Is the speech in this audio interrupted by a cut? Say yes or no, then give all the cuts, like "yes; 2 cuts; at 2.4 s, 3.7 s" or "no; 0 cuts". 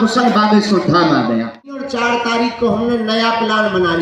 yes; 1 cut; at 1.9 s